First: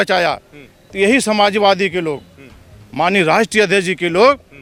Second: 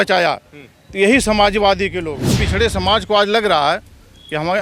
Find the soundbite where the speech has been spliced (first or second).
second